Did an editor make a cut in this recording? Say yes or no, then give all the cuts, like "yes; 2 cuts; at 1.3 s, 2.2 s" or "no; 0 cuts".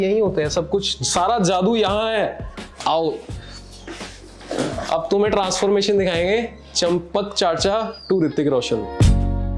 no; 0 cuts